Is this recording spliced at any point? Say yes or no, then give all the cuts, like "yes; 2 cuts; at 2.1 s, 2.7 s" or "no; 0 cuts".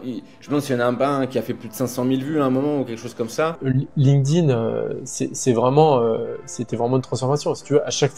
yes; 1 cut; at 3.6 s